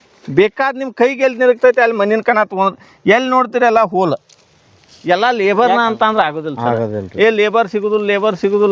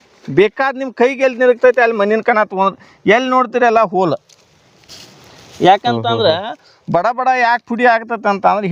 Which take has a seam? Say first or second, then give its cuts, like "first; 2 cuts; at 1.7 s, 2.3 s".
first; 1 cut; at 5.1 s